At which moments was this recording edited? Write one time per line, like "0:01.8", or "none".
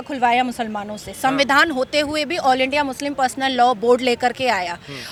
none